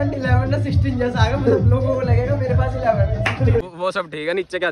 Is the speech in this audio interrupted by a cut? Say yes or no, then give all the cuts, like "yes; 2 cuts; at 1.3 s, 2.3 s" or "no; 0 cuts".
yes; 1 cut; at 3.6 s